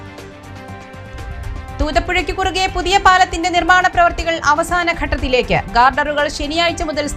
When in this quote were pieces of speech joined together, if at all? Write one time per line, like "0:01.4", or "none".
none